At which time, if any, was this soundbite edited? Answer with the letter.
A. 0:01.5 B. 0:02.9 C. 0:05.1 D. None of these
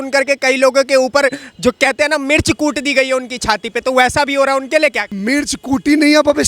C